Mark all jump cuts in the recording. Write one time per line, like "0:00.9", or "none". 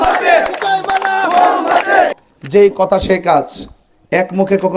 0:02.1